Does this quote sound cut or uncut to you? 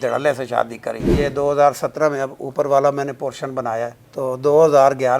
cut